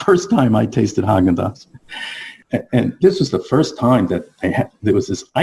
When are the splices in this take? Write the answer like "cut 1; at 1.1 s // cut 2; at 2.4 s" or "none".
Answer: cut 1; at 2.4 s